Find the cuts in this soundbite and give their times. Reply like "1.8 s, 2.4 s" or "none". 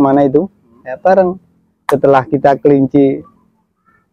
none